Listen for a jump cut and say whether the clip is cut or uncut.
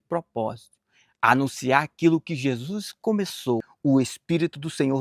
cut